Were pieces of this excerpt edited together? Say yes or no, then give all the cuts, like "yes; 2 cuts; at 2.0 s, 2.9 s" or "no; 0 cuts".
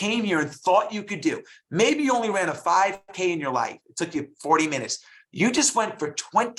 no; 0 cuts